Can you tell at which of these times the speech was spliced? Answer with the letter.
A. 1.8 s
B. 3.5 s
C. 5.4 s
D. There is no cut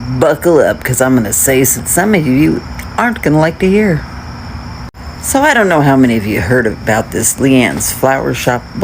A